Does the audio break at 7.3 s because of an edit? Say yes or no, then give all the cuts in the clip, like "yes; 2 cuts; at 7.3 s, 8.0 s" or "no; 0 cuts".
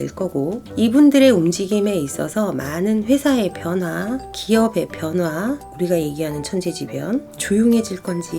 yes; 2 cuts; at 5.6 s, 7.3 s